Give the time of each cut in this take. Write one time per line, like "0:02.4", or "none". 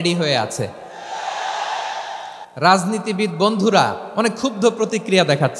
0:02.4
0:04.0